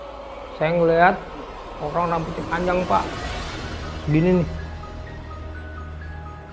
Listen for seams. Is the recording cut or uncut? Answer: uncut